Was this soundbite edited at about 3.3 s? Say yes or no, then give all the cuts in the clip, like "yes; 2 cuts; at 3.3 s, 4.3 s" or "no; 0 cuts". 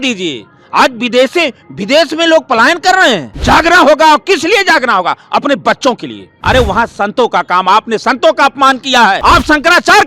yes; 3 cuts; at 3.3 s, 6.3 s, 9.2 s